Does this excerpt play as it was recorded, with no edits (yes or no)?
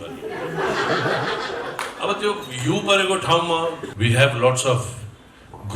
no